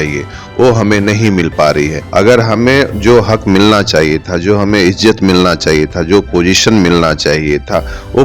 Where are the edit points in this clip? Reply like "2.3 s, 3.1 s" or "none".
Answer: 2.0 s